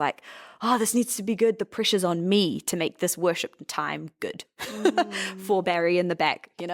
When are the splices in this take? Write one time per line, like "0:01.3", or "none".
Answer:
none